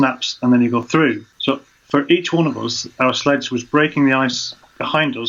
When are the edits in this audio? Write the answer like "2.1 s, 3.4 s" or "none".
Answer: 1.3 s